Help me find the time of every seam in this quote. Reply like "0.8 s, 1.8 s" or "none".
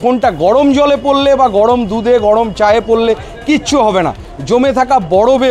4.2 s